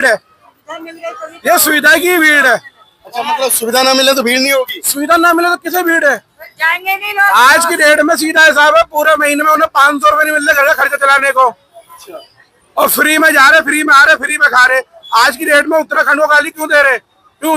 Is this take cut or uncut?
uncut